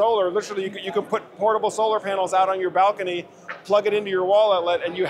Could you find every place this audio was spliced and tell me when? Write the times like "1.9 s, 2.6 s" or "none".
none